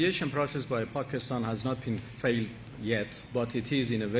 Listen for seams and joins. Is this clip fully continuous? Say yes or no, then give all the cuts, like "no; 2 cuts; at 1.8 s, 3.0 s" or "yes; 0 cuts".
no; 1 cut; at 3.2 s